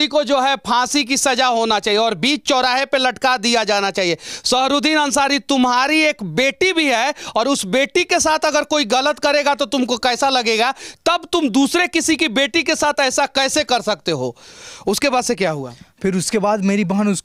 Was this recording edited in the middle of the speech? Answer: no; 0 cuts

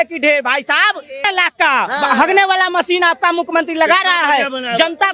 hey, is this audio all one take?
no; 1 cut; at 1.2 s

